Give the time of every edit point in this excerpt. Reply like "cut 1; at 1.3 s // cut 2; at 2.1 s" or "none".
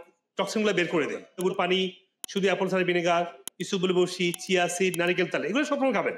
cut 1; at 1.2 s